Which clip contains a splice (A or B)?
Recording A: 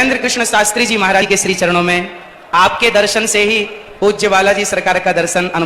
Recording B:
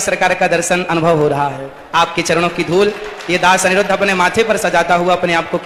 A